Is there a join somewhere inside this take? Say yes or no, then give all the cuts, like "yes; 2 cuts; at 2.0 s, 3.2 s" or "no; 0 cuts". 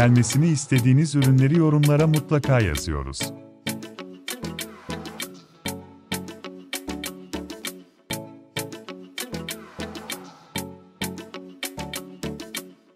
yes; 1 cut; at 3.1 s